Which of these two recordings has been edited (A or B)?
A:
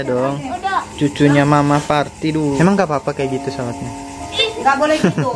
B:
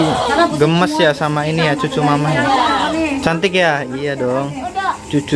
A